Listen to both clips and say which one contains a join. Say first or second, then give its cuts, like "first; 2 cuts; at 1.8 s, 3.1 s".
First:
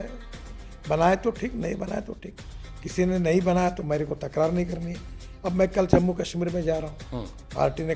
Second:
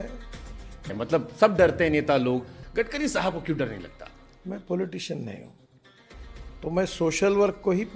second; 2 cuts; at 0.9 s, 2.6 s